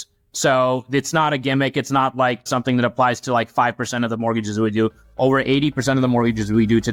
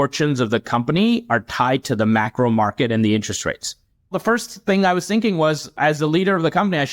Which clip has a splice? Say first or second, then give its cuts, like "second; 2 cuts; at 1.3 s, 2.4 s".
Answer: second; 1 cut; at 4.1 s